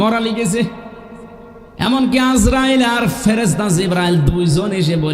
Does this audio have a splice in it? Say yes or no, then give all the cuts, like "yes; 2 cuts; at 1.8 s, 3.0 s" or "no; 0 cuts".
no; 0 cuts